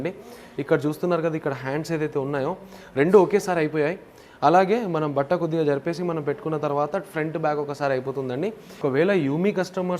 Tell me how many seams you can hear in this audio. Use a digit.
1